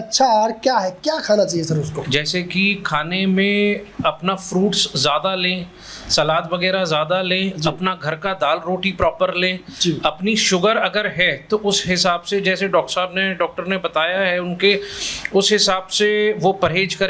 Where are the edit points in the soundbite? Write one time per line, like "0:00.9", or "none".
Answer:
none

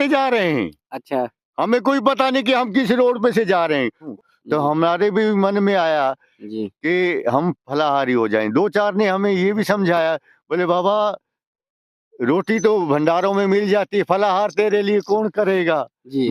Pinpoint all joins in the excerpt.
0:04.1

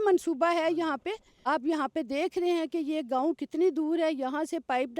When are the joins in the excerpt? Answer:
0:01.3

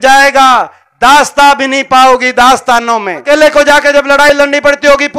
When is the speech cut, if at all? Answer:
0:03.2

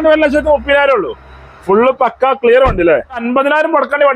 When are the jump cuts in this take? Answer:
0:03.2

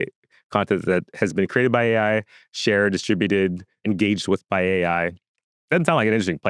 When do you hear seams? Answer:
none

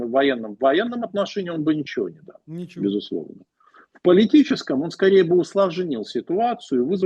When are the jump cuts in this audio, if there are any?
none

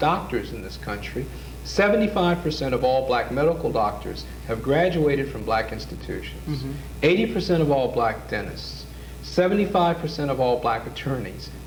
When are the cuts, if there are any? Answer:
none

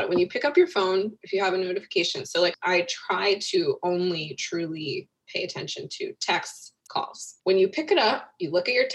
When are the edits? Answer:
0:02.5
0:07.0

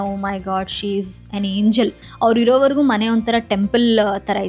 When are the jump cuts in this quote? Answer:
0:02.0

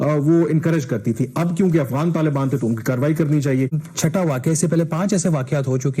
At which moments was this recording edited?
0:03.8

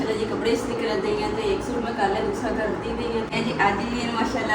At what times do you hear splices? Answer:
0:03.3

